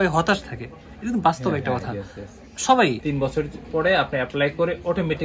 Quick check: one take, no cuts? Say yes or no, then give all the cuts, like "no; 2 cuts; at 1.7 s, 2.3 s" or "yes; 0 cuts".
no; 1 cut; at 3.0 s